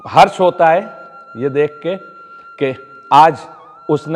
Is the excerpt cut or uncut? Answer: uncut